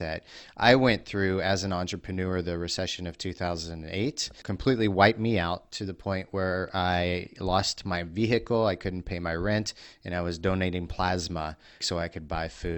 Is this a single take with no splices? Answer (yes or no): no